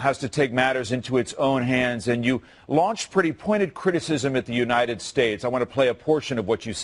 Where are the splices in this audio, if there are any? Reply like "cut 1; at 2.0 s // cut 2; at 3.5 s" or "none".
cut 1; at 4.3 s